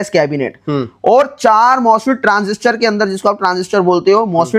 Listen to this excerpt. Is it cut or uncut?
uncut